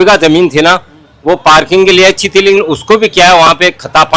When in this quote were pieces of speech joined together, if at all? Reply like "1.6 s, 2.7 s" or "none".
none